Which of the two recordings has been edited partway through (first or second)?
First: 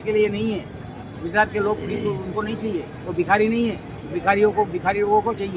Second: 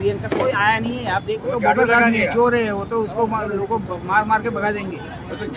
second